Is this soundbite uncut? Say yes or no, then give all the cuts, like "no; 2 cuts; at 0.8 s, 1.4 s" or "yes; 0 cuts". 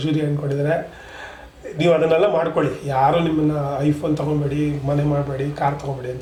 yes; 0 cuts